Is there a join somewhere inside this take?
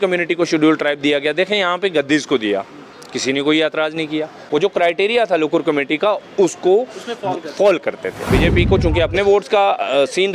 yes; 2 cuts; at 4.4 s, 8.1 s

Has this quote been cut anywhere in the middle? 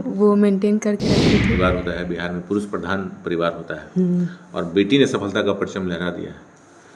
yes; 1 cut; at 1.6 s

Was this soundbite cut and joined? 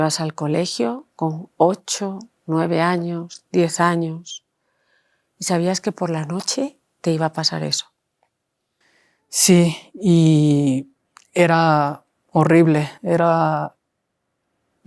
no; 0 cuts

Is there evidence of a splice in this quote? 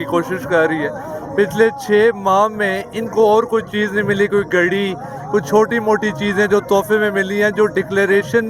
no; 0 cuts

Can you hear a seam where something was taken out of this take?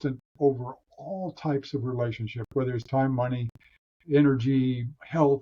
no; 0 cuts

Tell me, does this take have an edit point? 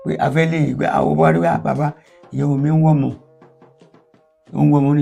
no; 0 cuts

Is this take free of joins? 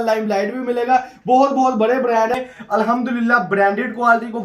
no; 1 cut; at 2.4 s

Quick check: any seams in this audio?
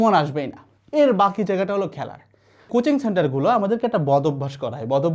yes; 1 cut; at 2.7 s

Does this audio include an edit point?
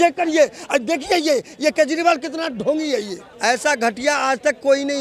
yes; 1 cut; at 3.3 s

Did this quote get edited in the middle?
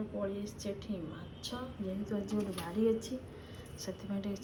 no; 0 cuts

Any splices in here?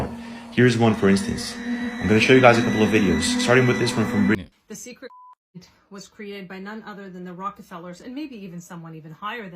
yes; 1 cut; at 4.4 s

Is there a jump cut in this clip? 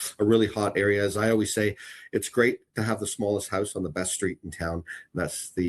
no; 0 cuts

